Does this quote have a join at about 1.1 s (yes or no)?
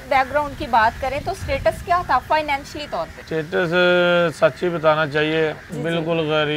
no